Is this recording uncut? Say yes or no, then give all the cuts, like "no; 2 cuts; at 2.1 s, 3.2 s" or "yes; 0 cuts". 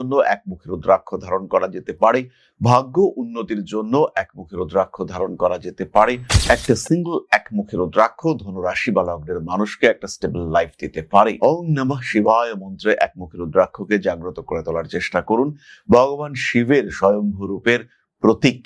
no; 1 cut; at 6.3 s